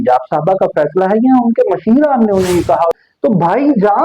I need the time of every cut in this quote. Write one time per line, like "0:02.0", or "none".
0:02.9